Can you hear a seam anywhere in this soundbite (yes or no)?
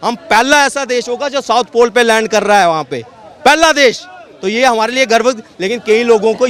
no